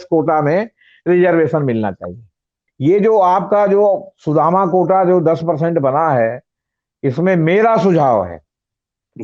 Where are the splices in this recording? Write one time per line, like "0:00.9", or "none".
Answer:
0:02.6